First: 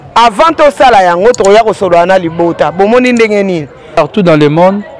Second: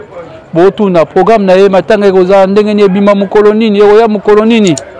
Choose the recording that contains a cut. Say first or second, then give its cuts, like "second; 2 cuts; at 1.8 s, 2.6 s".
first; 1 cut; at 4.0 s